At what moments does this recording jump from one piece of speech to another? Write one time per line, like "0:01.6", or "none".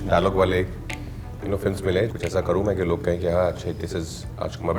0:02.1